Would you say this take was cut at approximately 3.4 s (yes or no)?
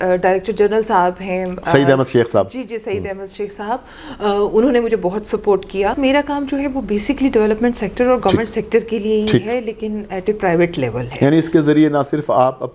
no